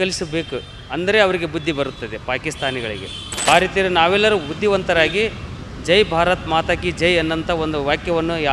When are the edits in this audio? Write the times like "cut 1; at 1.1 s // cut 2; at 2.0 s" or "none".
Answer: cut 1; at 3.5 s